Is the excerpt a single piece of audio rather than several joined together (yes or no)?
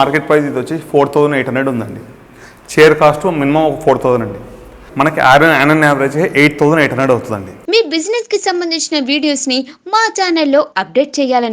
no